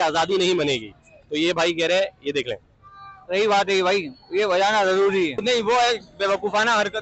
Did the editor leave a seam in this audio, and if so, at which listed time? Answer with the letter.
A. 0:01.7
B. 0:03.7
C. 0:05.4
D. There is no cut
C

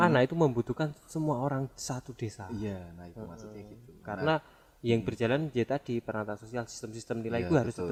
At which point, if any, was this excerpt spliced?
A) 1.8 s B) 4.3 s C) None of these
C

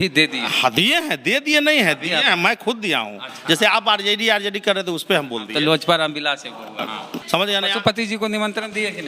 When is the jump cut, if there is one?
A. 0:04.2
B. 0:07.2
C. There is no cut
B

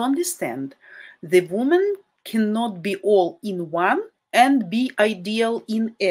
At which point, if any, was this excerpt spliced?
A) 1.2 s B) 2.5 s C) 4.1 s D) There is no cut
C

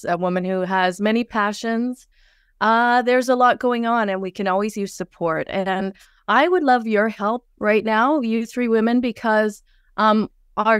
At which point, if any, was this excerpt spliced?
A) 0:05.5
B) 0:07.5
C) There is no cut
C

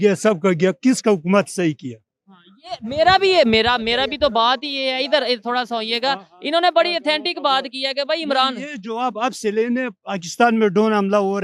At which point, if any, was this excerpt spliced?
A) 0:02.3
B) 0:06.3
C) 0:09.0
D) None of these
D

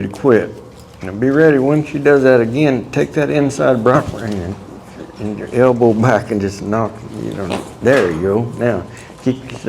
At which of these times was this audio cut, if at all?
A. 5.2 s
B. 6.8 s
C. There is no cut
C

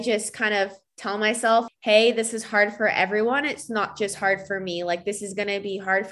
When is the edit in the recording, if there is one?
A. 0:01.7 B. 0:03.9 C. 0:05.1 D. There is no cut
A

